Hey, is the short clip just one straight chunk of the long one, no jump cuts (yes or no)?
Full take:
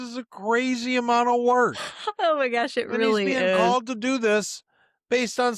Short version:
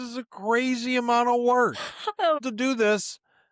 no